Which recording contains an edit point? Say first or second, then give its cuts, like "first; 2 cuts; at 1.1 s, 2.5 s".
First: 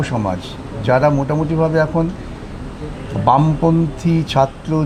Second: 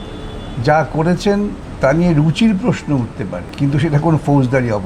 second; 2 cuts; at 1.6 s, 3.4 s